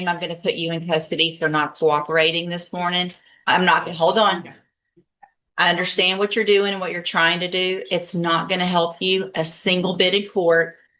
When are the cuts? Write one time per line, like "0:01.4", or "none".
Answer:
none